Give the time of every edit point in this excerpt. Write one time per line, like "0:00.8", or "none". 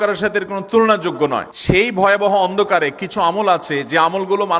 0:01.5